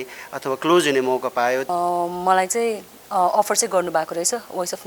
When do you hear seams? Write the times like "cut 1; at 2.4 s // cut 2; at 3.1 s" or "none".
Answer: cut 1; at 1.7 s